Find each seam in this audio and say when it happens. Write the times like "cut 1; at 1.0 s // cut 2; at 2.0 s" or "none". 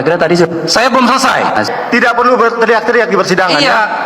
cut 1; at 1.7 s